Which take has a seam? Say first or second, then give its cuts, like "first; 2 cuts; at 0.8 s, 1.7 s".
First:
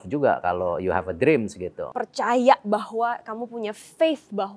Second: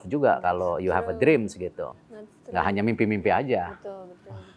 first; 1 cut; at 1.9 s